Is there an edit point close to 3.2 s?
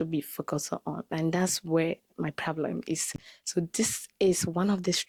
no; 0 cuts

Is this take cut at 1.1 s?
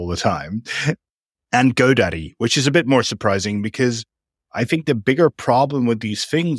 yes; 1 cut; at 1.1 s

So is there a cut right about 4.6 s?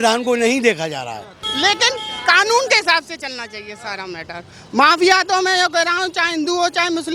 no; 1 cut; at 1.3 s

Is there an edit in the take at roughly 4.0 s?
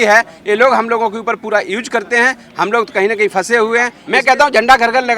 yes; 1 cut; at 4.0 s

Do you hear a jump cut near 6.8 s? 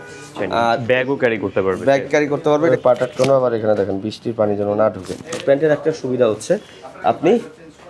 no; 2 cuts; at 2.7 s, 5.4 s

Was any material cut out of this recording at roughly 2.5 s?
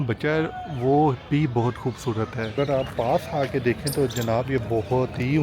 yes; 1 cut; at 2.5 s

